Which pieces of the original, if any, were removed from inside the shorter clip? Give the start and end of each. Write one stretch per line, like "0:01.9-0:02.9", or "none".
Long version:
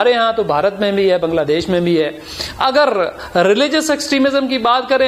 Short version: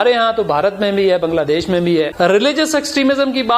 0:02.1-0:03.3